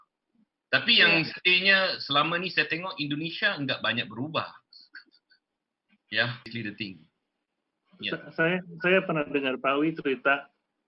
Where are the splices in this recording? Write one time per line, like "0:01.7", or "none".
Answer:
0:06.5